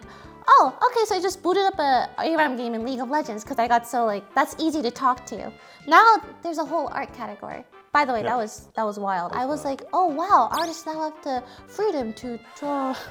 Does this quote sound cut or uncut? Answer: uncut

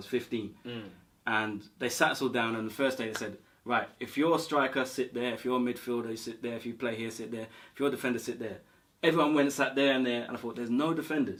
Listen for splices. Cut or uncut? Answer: uncut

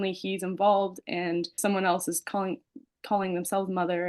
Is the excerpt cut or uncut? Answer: cut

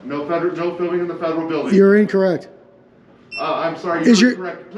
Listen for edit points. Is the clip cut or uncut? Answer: uncut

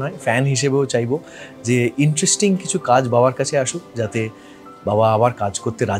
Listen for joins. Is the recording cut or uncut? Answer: uncut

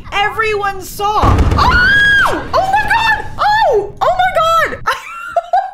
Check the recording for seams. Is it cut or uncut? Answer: cut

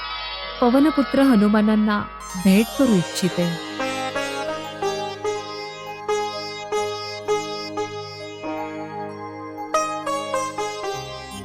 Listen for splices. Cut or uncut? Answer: uncut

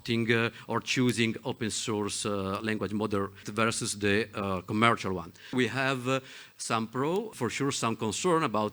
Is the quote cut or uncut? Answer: cut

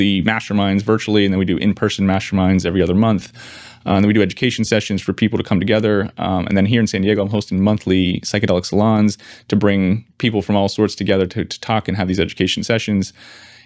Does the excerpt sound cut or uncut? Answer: uncut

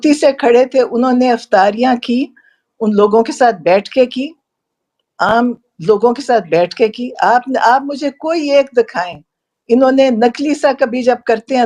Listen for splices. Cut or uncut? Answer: uncut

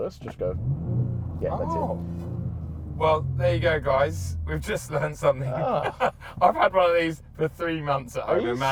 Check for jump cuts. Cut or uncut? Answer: uncut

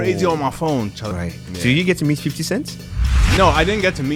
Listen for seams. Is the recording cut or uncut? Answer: cut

